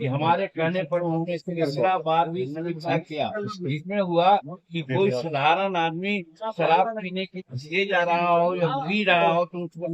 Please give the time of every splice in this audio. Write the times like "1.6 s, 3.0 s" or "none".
none